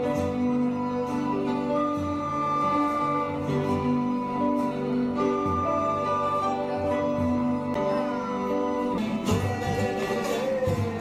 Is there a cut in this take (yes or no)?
no